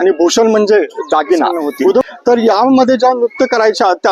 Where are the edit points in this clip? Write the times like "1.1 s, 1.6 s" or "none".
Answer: 2.0 s